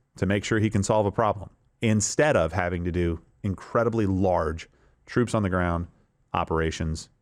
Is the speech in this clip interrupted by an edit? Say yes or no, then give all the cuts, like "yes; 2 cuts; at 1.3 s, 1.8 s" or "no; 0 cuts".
no; 0 cuts